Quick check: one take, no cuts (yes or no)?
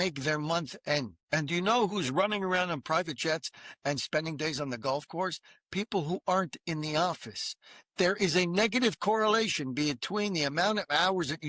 no